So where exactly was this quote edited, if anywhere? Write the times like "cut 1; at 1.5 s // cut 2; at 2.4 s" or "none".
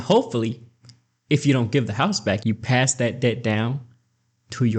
cut 1; at 2.4 s